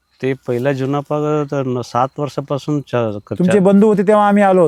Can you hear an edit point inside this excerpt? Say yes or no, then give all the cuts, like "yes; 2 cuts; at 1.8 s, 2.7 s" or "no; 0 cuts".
no; 0 cuts